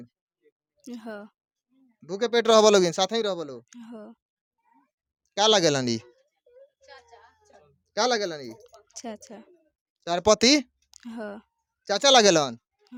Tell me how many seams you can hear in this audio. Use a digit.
0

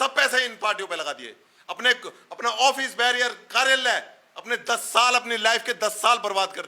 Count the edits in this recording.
0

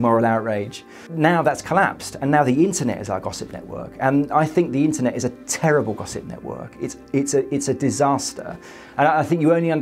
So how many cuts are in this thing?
1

